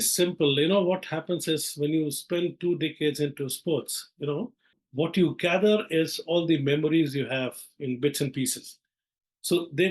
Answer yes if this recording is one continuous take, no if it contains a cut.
no